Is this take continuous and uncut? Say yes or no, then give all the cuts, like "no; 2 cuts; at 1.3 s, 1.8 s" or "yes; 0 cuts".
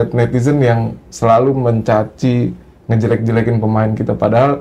yes; 0 cuts